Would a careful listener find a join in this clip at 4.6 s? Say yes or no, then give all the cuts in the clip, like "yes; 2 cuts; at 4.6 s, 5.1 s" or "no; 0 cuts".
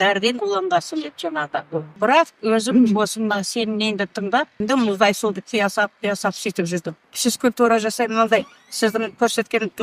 yes; 3 cuts; at 2.0 s, 4.6 s, 7.1 s